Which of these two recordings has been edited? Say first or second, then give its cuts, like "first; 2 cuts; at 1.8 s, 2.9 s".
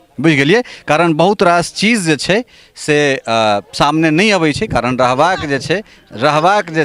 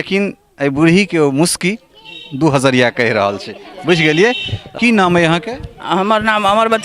second; 1 cut; at 4.7 s